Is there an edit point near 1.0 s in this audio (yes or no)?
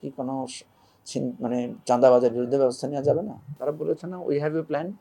no